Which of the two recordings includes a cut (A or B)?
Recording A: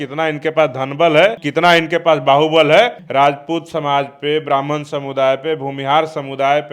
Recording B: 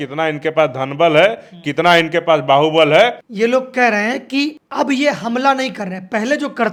A